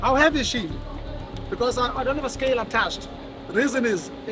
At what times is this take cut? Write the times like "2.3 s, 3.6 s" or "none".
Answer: none